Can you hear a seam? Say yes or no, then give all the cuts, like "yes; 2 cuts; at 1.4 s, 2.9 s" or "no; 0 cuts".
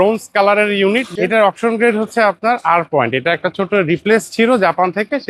yes; 1 cut; at 1.1 s